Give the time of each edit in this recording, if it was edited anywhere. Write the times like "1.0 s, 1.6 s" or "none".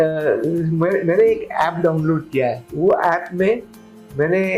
2.6 s